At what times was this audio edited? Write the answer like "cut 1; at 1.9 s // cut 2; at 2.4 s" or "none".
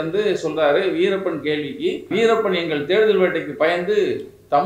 cut 1; at 2.1 s